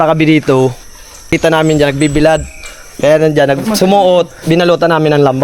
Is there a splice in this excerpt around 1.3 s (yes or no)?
yes